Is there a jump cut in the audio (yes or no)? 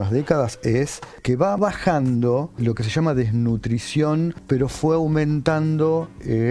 yes